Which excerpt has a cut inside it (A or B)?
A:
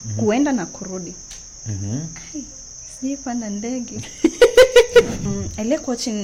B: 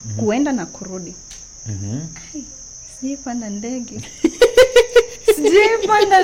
A